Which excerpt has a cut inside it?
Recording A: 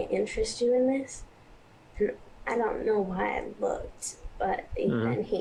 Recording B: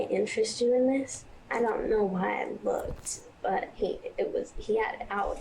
B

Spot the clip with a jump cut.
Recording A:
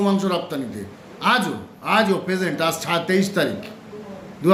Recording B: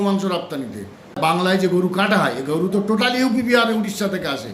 B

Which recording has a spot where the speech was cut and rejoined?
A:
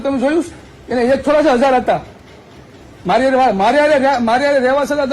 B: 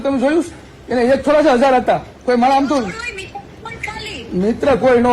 B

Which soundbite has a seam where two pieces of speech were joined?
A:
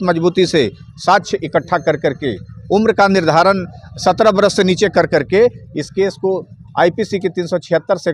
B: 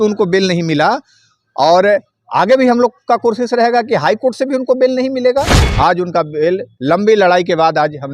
B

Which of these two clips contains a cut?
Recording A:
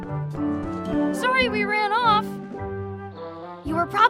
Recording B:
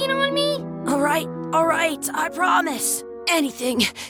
A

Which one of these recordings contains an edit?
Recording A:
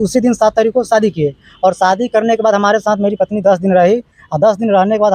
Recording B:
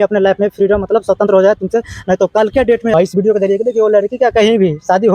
B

